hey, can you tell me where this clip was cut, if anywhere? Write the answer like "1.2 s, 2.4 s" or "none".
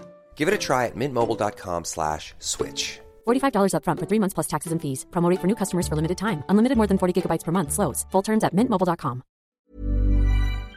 9.5 s